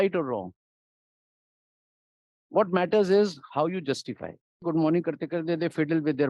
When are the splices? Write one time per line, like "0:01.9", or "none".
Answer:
0:04.6